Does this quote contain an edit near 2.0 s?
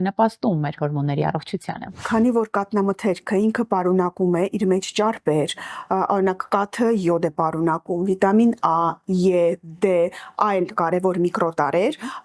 yes; 1 cut; at 2.0 s

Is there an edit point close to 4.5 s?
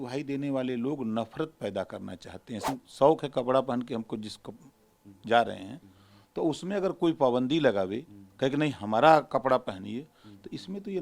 no; 1 cut; at 2.7 s

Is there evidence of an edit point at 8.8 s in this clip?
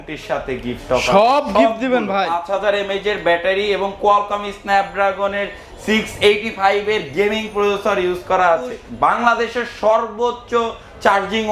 yes; 2 cuts; at 2.4 s, 8.8 s

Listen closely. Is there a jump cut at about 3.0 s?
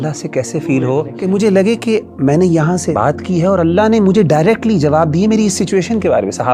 yes; 2 cuts; at 1.1 s, 3.0 s

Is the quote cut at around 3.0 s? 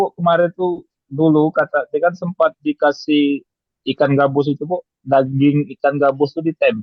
no; 0 cuts

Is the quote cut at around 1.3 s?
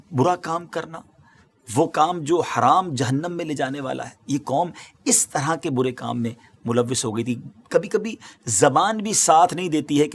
no; 0 cuts

